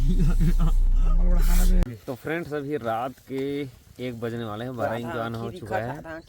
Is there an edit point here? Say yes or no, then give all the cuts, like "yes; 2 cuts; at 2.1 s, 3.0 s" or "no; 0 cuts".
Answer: yes; 1 cut; at 1.8 s